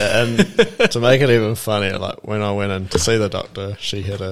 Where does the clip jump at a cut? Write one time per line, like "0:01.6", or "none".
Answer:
none